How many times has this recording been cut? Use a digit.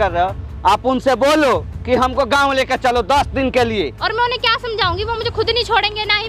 1